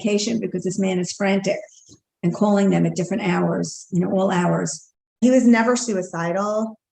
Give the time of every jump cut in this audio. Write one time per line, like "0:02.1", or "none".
0:05.2